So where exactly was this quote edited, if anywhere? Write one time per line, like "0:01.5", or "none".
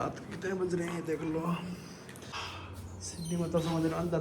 0:02.3